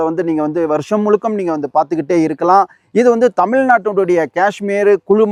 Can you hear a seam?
no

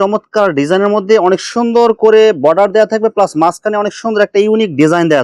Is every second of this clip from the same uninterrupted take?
yes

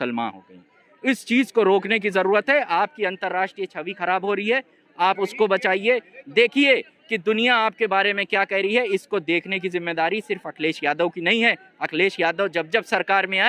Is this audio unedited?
yes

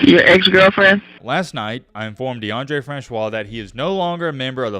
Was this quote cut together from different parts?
yes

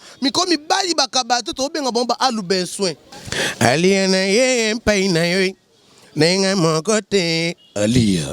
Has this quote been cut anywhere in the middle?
yes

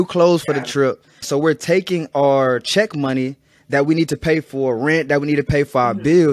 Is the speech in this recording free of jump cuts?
no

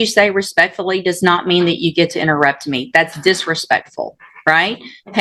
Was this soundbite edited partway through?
no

